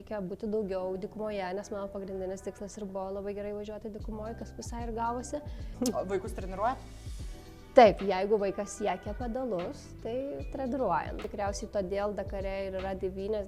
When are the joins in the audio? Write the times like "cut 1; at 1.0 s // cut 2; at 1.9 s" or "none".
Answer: cut 1; at 5.6 s // cut 2; at 11.3 s